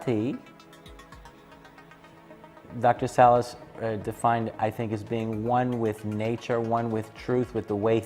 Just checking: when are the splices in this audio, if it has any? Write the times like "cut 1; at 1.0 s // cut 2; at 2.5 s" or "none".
none